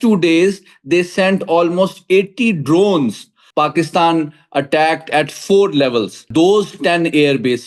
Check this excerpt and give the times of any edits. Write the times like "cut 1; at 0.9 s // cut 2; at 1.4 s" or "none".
cut 1; at 3.4 s // cut 2; at 6.3 s

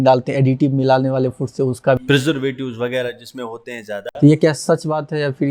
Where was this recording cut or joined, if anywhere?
none

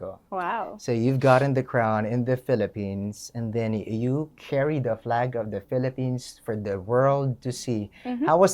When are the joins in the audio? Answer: none

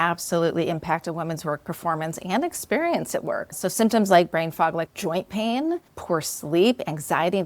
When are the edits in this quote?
cut 1; at 3.5 s // cut 2; at 4.9 s // cut 3; at 5.9 s

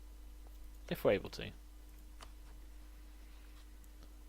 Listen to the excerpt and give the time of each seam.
cut 1; at 2.9 s

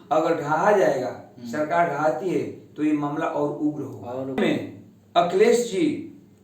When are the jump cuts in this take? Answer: cut 1; at 4.4 s

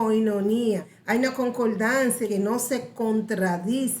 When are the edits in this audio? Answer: cut 1; at 0.9 s // cut 2; at 2.5 s

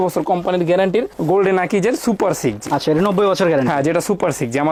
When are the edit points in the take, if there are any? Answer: none

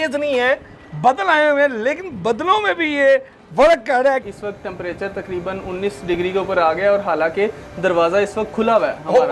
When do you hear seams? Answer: cut 1; at 4.3 s

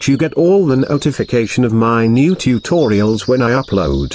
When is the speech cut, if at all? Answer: none

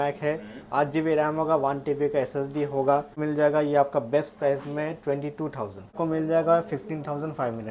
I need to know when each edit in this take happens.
cut 1; at 3.2 s // cut 2; at 5.9 s

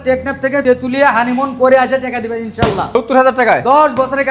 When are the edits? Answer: cut 1; at 3.0 s

